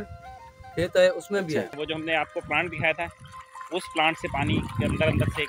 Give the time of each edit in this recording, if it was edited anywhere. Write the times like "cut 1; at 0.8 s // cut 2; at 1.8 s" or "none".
cut 1; at 1.7 s